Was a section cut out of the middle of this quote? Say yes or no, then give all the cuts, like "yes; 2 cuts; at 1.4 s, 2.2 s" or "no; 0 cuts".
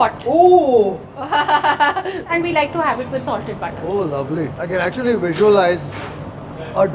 yes; 2 cuts; at 2.2 s, 4.6 s